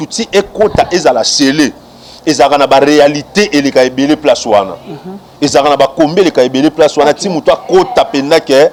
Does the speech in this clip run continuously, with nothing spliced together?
yes; 0 cuts

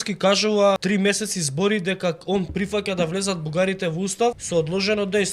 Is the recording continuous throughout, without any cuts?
no; 2 cuts; at 0.8 s, 4.4 s

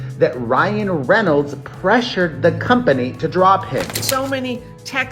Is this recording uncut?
no; 1 cut; at 4.0 s

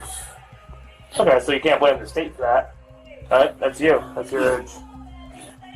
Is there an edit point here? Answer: no; 0 cuts

